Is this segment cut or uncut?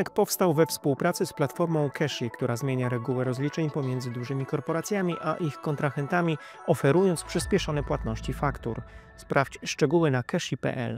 uncut